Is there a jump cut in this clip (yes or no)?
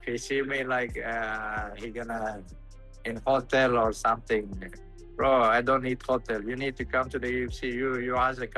no